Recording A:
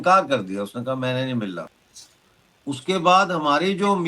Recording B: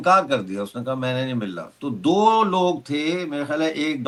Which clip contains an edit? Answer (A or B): A